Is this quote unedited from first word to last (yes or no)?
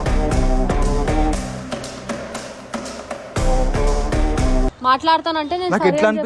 no